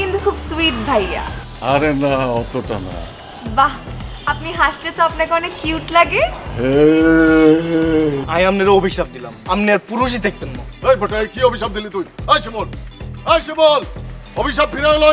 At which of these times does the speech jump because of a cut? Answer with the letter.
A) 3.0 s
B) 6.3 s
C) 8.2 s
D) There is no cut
C